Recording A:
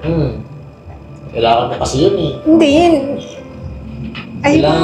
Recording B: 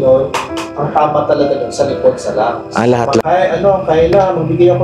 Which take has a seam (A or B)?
B